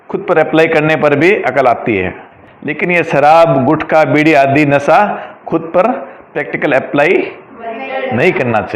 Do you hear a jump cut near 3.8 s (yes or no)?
no